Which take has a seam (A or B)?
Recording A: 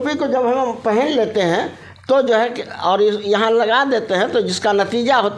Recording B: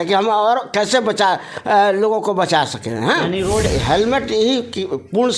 B